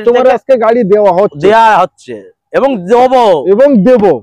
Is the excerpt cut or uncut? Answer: uncut